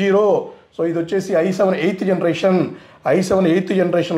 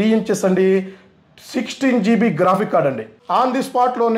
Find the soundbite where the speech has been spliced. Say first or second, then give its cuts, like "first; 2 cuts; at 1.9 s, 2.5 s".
second; 1 cut; at 3.2 s